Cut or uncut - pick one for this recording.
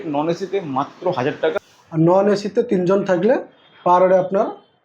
cut